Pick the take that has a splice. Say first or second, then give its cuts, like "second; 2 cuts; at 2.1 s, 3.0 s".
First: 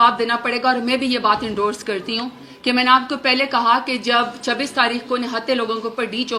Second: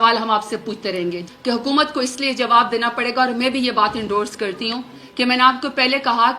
second; 1 cut; at 1.2 s